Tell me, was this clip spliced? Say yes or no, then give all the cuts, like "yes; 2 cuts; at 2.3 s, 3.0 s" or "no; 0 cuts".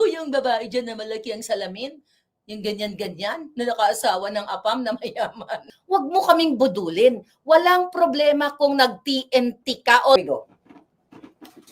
yes; 2 cuts; at 5.7 s, 10.2 s